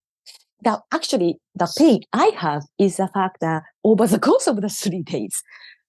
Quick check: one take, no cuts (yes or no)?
yes